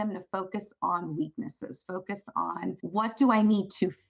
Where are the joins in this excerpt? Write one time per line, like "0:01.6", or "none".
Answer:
0:02.8